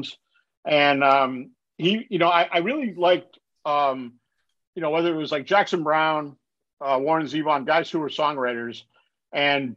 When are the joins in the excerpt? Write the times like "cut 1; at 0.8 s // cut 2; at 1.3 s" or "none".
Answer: none

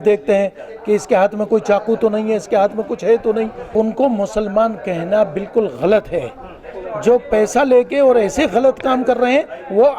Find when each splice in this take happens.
cut 1; at 3.6 s

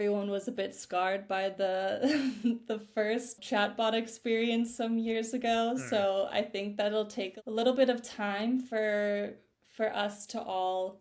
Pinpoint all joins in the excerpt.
cut 1; at 3.4 s // cut 2; at 7.2 s

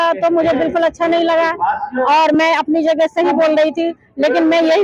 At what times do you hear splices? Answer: none

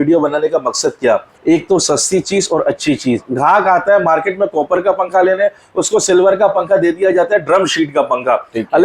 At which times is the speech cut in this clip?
cut 1; at 1.3 s // cut 2; at 3.3 s

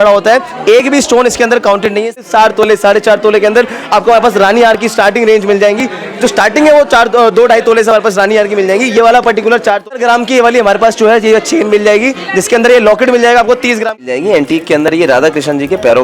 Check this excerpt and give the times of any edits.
cut 1; at 2.2 s // cut 2; at 9.9 s // cut 3; at 13.9 s

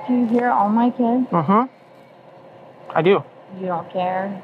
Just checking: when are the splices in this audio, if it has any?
none

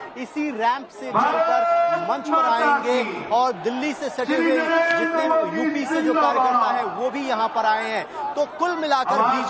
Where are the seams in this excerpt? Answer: cut 1; at 4.9 s

